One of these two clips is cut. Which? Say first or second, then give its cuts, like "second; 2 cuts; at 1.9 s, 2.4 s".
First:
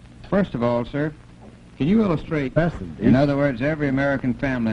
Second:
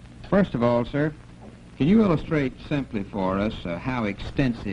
second; 1 cut; at 2.6 s